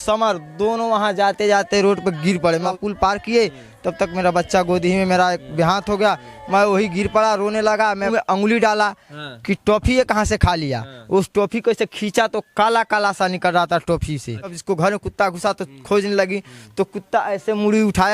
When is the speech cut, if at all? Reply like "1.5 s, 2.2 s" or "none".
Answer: 2.7 s, 8.1 s, 14.6 s

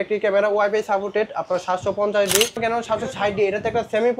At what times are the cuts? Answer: 2.6 s

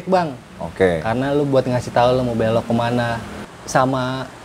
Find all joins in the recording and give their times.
3.4 s

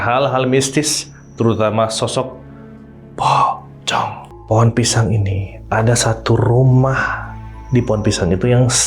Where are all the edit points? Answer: 4.3 s

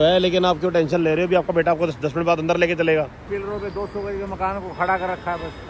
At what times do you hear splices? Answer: 3.3 s

